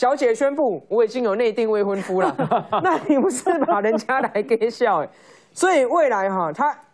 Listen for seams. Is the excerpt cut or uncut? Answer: uncut